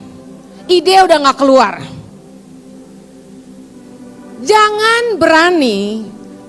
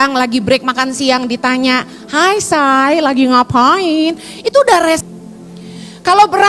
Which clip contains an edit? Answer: second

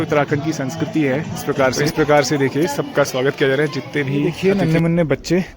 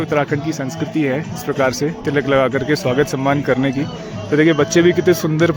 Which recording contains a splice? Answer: first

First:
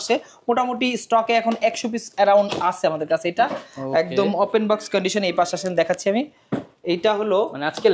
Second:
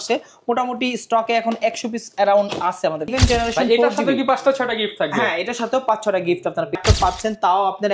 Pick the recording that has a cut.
second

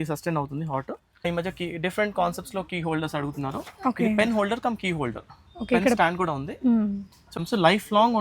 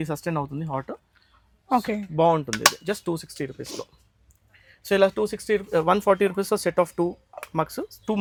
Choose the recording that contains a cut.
first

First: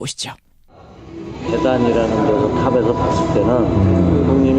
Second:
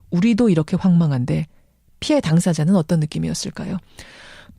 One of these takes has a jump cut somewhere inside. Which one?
first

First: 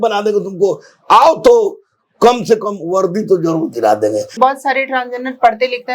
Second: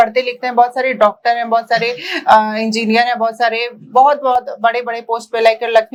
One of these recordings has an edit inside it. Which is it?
first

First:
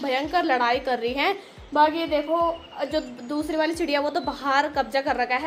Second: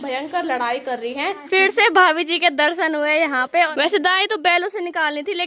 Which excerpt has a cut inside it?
second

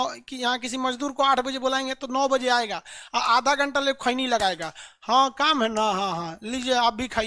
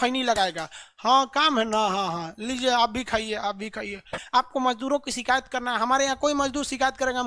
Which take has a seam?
second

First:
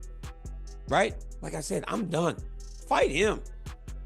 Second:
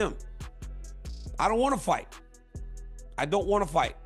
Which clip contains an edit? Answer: first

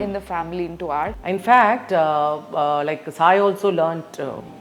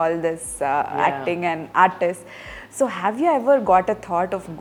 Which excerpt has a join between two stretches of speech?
first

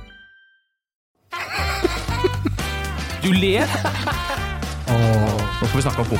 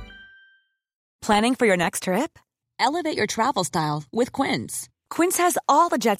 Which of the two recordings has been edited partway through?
first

